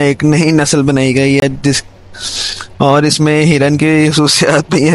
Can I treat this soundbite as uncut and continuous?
yes; 0 cuts

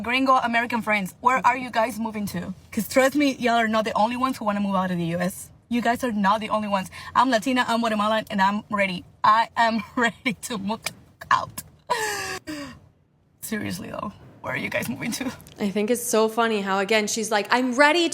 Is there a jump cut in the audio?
no; 0 cuts

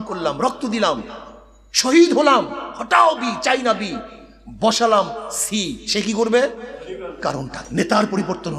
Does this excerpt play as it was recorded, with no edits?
no; 1 cut; at 7.6 s

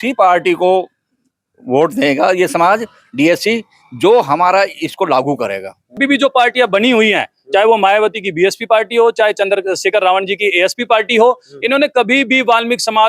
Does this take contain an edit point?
yes; 1 cut; at 6.0 s

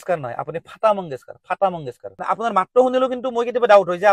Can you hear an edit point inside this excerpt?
yes; 1 cut; at 2.1 s

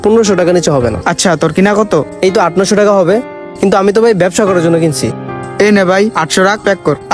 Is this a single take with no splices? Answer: no; 1 cut; at 1.0 s

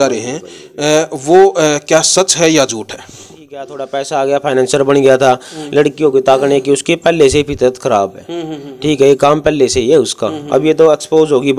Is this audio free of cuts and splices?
no; 1 cut; at 3.8 s

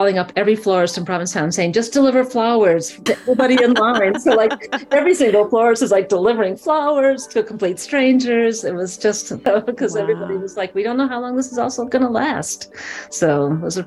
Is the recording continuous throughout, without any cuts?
no; 1 cut; at 9.4 s

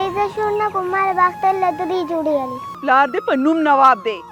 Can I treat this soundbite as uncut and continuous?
no; 1 cut; at 2.6 s

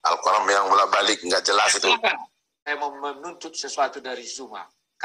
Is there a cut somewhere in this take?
yes; 1 cut; at 2.6 s

